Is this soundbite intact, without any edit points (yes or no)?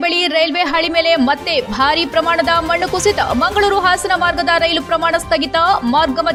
yes